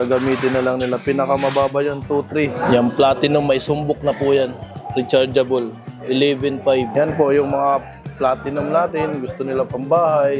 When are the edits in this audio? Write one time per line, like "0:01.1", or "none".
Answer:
0:02.5
0:06.9